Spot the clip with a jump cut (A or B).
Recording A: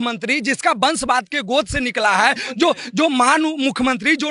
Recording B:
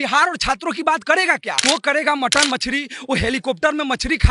B